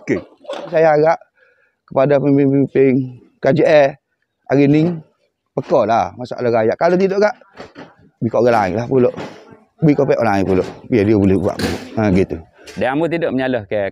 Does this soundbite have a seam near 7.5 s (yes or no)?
no